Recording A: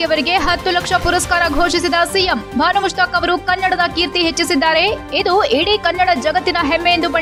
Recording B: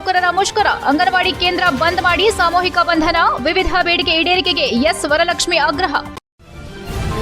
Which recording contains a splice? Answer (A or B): B